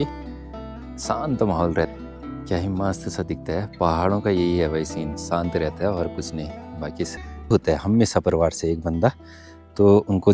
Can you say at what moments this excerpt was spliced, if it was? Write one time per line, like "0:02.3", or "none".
0:01.9
0:07.5